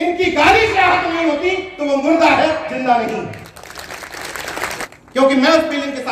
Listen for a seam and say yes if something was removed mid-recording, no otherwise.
yes